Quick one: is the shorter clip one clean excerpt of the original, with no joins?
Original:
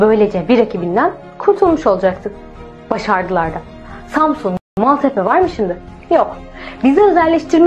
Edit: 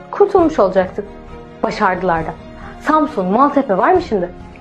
no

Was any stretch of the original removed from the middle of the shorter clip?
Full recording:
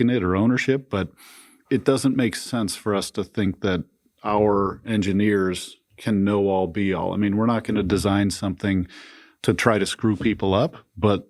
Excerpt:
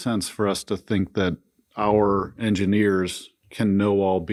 no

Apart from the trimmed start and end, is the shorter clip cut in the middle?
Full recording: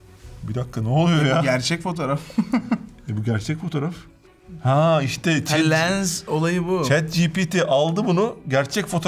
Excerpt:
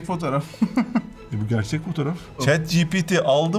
yes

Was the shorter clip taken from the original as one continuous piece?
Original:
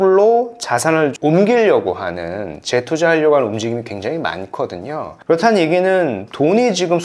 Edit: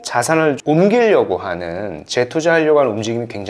yes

